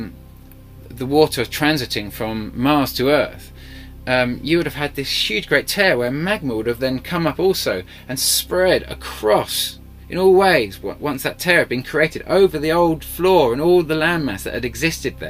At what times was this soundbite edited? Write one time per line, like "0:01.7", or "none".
0:10.8